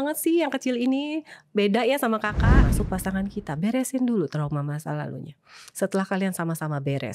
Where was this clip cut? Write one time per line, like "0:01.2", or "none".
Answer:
0:02.7